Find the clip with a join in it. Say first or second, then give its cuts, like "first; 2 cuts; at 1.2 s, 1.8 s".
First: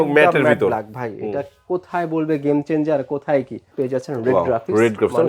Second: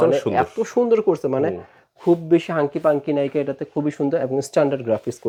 first; 1 cut; at 3.6 s